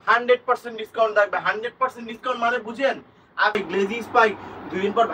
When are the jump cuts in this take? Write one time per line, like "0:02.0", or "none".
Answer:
0:03.6

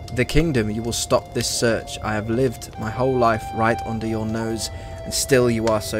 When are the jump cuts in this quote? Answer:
none

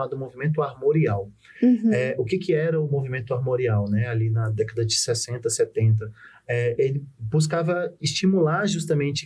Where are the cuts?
none

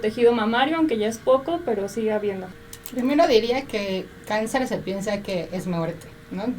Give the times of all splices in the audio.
0:02.5

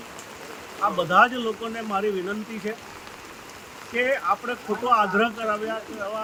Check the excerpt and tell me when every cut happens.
none

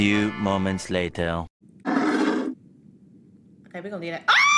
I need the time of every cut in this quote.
0:01.9

